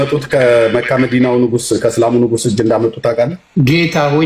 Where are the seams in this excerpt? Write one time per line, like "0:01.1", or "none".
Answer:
none

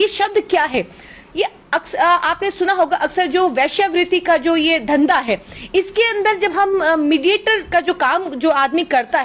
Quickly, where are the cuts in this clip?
none

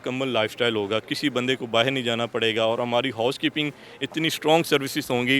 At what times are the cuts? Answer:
none

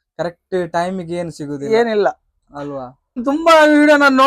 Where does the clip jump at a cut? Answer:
0:03.2

